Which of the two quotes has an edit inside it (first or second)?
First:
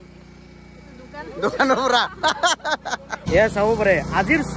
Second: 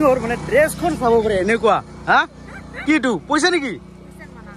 first